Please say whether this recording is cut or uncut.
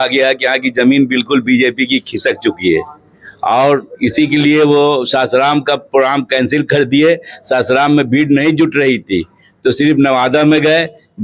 uncut